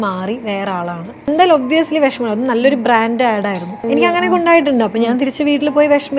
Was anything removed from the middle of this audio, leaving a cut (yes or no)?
yes